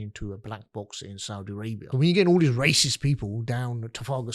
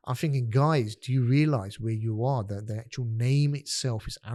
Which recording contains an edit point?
first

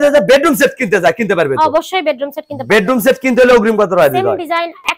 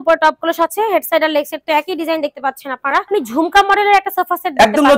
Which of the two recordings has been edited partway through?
second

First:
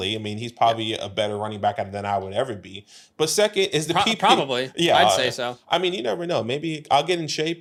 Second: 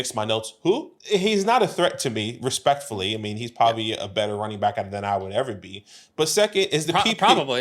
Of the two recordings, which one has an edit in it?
second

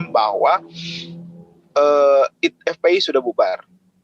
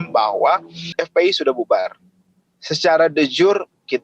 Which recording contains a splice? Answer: second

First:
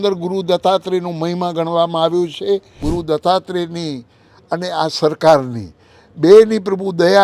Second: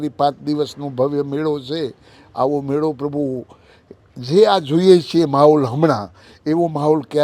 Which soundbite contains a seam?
first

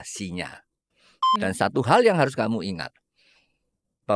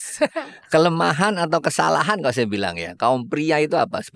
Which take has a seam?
first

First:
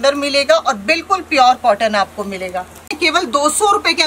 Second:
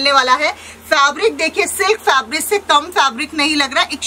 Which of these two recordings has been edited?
first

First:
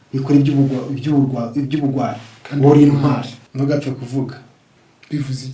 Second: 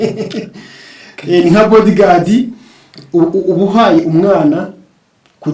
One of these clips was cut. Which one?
first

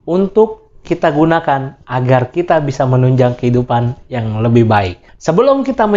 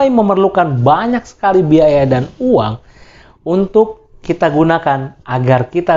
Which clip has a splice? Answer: first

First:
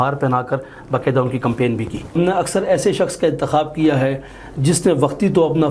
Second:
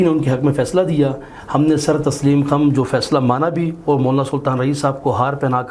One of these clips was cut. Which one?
first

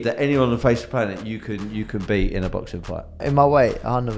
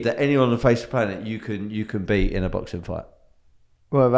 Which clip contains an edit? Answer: first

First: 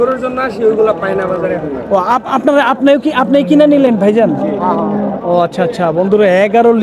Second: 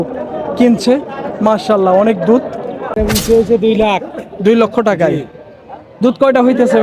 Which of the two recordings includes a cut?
second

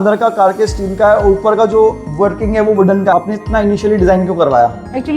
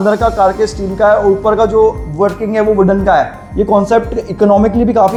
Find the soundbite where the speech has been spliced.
first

